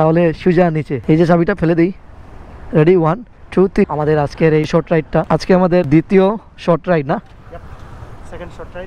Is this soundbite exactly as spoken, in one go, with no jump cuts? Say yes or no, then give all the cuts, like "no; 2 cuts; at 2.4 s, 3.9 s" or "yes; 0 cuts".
no; 2 cuts; at 0.9 s, 3.9 s